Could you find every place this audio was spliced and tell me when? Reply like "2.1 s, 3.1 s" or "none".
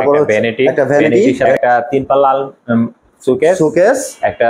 1.5 s